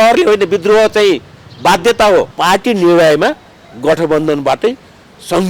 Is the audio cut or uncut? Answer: cut